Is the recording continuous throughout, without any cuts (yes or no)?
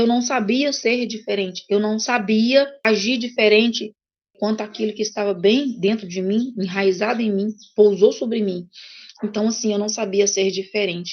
no